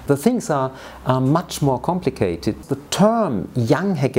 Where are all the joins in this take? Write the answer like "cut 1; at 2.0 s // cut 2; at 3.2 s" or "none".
cut 1; at 2.6 s